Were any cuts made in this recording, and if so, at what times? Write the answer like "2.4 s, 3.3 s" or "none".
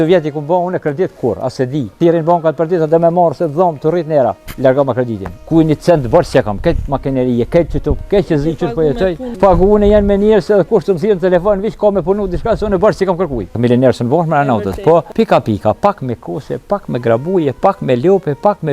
1.9 s, 4.5 s, 5.3 s, 9.2 s, 13.6 s, 15.1 s